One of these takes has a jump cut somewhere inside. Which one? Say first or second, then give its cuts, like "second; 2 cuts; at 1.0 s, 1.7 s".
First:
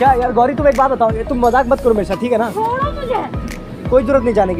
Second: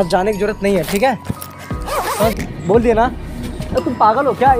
second; 1 cut; at 2.4 s